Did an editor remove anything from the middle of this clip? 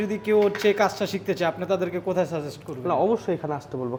no; 0 cuts

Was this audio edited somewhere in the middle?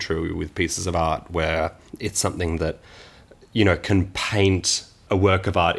yes; 2 cuts; at 1.9 s, 5.0 s

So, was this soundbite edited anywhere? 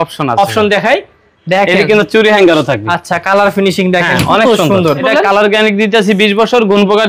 yes; 1 cut; at 5.0 s

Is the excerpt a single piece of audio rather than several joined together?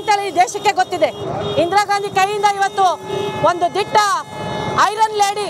yes; 0 cuts

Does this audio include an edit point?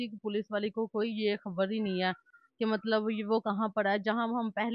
no; 0 cuts

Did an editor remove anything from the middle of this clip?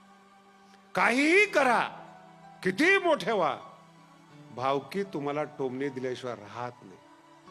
yes; 1 cut; at 0.9 s

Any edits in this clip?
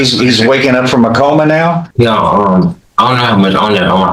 yes; 1 cut; at 1.9 s

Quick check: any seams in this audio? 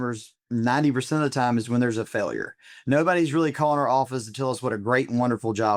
no; 0 cuts

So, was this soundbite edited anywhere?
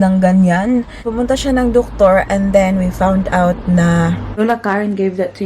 yes; 2 cuts; at 1.1 s, 4.4 s

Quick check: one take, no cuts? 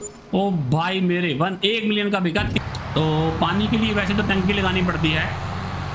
no; 1 cut; at 2.6 s

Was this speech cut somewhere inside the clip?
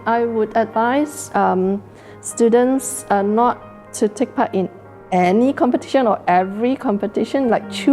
no; 0 cuts

